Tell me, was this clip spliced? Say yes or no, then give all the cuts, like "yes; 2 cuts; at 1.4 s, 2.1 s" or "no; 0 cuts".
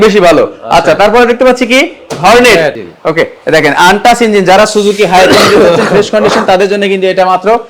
yes; 1 cut; at 2.9 s